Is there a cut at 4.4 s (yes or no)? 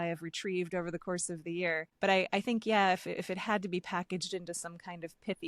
no